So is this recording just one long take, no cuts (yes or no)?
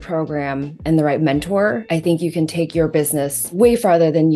no